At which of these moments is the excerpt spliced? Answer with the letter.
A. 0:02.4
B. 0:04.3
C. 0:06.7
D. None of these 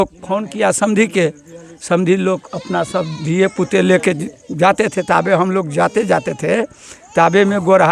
D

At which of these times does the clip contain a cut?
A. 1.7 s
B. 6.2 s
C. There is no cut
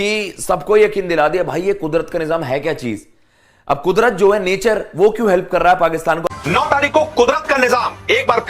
B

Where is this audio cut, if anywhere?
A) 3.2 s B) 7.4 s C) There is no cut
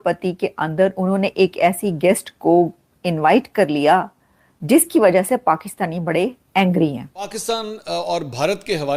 B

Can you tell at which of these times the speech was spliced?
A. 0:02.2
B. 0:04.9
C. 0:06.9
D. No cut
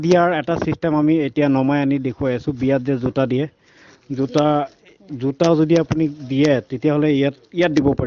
D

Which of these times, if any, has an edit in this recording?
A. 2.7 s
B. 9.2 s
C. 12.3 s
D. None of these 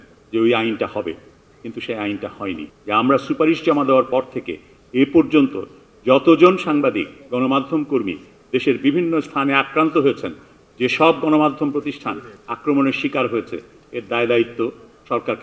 A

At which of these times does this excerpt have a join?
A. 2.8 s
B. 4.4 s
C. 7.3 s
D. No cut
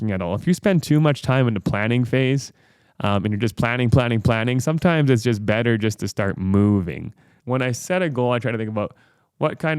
C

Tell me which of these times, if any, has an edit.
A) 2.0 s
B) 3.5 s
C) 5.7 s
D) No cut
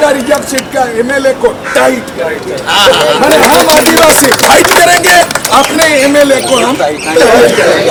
D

